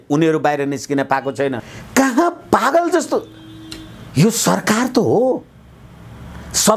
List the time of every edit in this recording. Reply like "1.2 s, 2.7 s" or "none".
1.7 s